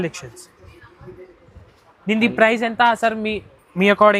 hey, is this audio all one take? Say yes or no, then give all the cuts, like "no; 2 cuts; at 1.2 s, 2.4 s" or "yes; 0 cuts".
yes; 0 cuts